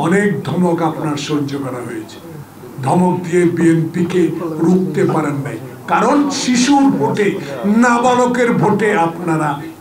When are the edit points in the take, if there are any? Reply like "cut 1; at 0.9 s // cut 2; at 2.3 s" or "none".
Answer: none